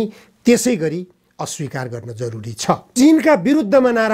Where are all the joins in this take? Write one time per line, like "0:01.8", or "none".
0:02.9